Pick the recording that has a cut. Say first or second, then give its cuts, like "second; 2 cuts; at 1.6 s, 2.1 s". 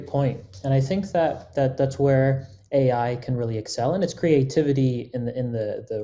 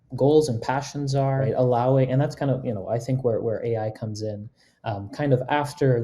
second; 1 cut; at 1.4 s